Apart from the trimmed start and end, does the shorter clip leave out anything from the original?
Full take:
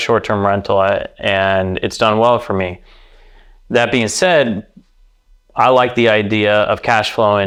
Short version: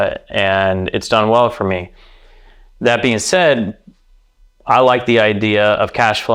no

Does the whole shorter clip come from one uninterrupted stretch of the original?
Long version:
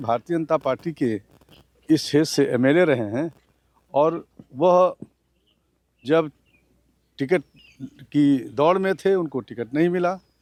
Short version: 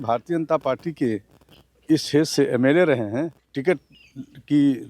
no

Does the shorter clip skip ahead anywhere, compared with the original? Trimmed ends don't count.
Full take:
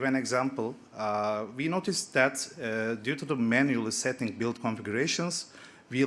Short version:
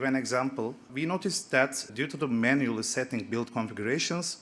yes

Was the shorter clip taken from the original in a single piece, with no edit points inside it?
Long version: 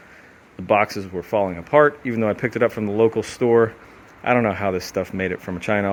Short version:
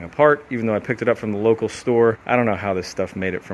no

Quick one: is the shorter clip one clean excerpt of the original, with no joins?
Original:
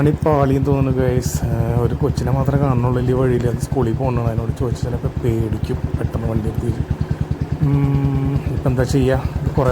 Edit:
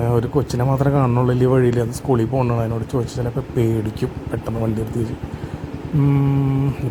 yes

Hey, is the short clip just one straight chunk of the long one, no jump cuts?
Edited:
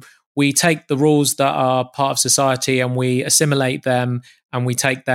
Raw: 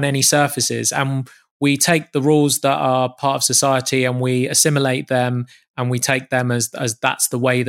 yes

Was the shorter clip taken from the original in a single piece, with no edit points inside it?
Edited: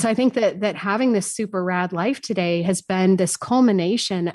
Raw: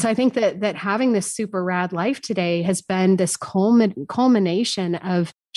no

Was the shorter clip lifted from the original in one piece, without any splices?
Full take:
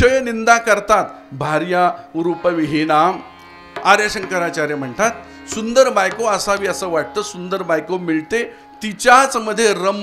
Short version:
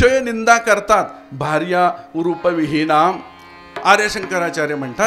yes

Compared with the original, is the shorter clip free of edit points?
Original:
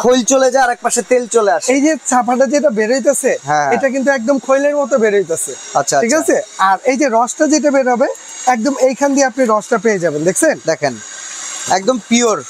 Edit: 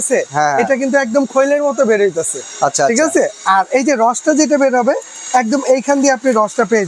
yes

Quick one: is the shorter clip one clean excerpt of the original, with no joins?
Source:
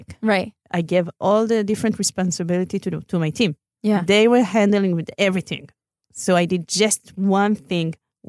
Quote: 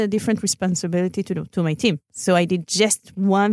no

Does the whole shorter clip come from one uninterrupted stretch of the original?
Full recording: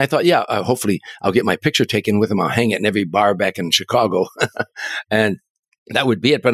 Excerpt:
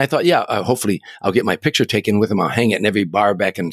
yes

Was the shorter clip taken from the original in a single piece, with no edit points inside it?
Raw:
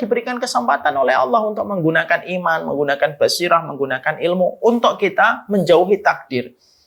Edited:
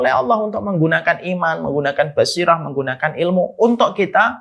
yes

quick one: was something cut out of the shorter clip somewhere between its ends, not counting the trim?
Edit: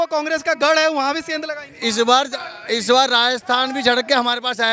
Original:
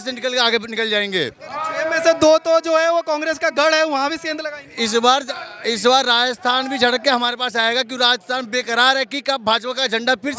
no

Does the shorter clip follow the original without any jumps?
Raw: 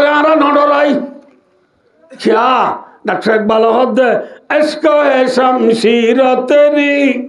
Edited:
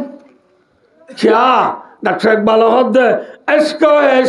yes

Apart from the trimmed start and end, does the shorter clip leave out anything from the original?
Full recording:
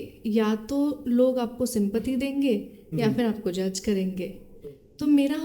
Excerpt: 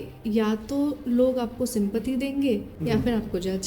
yes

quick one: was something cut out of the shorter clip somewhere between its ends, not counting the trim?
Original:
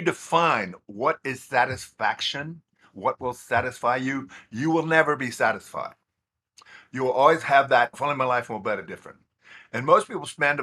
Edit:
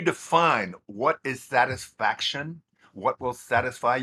no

